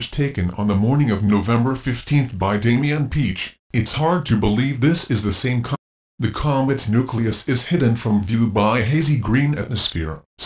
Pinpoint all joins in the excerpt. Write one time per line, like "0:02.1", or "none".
none